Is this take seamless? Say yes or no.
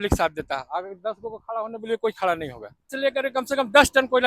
no